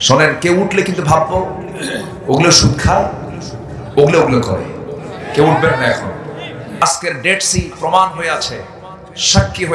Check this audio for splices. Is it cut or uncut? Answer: cut